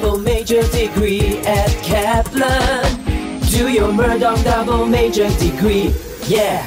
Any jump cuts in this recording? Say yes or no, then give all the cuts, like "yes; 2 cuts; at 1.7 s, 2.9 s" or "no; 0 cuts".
no; 0 cuts